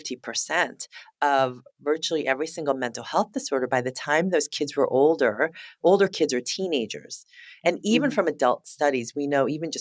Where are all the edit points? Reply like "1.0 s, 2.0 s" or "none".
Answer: none